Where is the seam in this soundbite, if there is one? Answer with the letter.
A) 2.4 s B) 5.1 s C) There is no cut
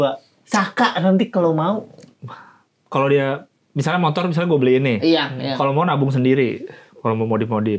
C